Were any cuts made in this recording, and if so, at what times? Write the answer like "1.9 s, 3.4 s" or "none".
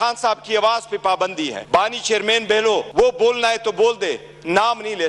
1.6 s, 2.9 s